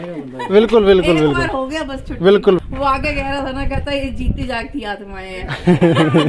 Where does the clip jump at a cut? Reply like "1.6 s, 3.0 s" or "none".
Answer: 2.6 s